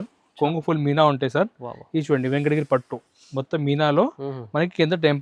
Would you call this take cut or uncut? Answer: uncut